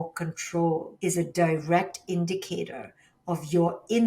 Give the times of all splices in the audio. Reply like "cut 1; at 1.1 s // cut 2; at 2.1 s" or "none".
cut 1; at 0.9 s